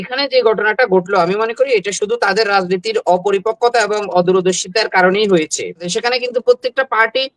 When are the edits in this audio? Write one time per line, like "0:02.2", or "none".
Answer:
0:05.9